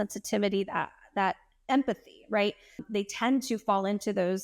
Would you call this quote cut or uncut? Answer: cut